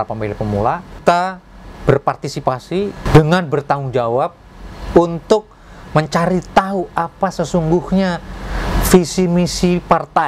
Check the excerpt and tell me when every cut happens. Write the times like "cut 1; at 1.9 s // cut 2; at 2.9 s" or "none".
cut 1; at 1.0 s // cut 2; at 3.0 s

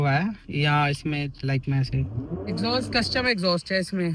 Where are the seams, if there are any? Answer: cut 1; at 2.4 s

